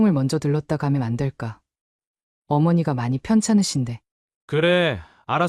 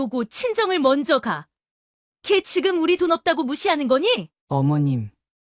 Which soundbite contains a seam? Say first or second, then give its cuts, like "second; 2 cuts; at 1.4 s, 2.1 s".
second; 1 cut; at 4.3 s